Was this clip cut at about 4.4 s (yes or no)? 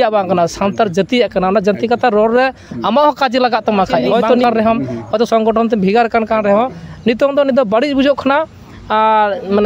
yes